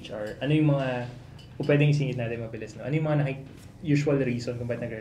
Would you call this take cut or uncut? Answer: uncut